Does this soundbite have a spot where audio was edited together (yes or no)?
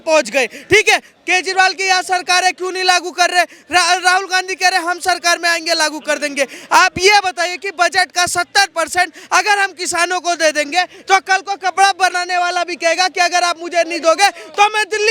no